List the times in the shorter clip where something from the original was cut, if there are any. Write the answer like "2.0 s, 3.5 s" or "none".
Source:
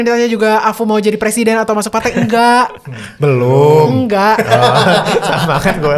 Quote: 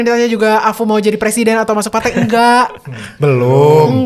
none